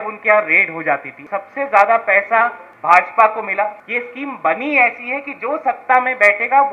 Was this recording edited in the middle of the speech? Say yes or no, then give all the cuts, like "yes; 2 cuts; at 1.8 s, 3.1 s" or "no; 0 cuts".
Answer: yes; 3 cuts; at 1.1 s, 2.7 s, 3.8 s